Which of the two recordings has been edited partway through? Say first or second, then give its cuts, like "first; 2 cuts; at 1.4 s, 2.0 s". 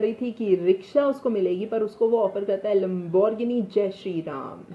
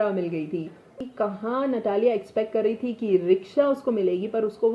second; 1 cut; at 1.0 s